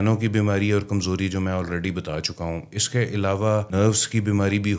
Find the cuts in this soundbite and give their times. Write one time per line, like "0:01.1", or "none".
0:03.7